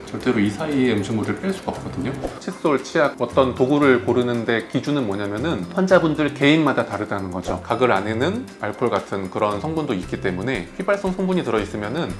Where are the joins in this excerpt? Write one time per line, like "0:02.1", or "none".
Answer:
0:02.3
0:07.6